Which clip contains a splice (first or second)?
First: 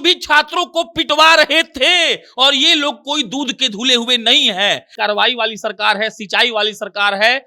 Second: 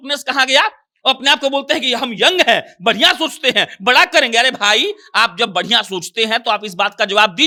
first